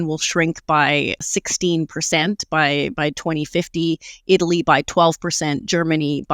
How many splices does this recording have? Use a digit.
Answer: 1